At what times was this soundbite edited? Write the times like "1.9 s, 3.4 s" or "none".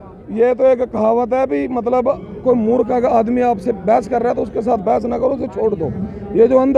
none